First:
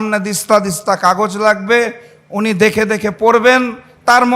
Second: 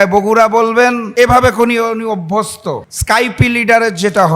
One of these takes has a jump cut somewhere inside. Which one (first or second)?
second